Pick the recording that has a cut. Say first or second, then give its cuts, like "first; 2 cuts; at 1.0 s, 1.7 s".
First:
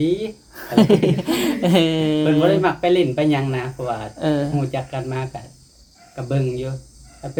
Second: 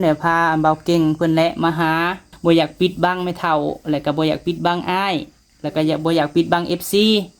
second; 1 cut; at 2.3 s